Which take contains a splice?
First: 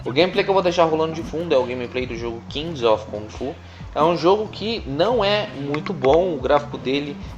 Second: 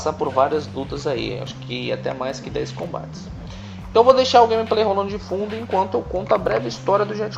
first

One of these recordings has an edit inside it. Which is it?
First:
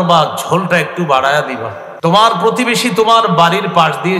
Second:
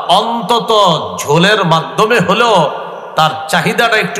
first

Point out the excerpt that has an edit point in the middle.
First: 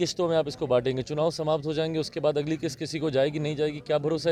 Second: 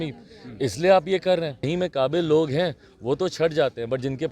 second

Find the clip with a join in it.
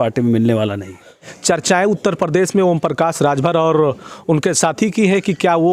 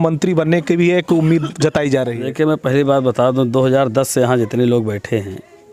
first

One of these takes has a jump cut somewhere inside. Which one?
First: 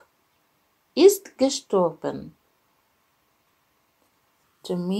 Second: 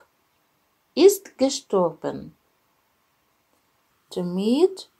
second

